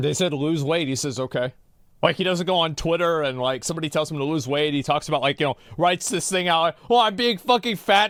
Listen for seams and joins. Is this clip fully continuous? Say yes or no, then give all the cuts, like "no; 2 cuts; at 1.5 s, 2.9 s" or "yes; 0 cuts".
yes; 0 cuts